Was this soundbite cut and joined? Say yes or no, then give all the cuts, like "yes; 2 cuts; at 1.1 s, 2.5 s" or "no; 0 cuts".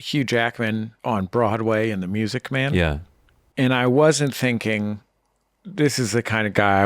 yes; 1 cut; at 0.9 s